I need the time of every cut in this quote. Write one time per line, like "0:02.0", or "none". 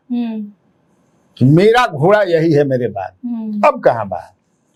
none